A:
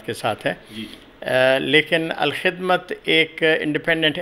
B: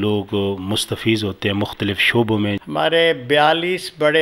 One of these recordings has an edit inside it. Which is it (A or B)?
B